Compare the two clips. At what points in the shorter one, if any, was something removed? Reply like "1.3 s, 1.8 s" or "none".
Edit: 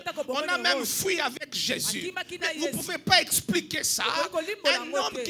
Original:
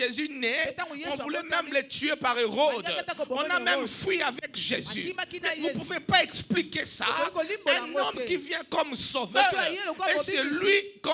none